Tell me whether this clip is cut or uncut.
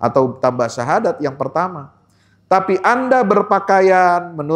uncut